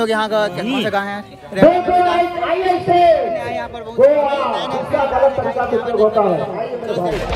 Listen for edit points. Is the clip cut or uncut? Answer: uncut